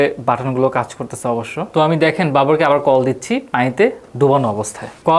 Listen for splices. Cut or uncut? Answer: cut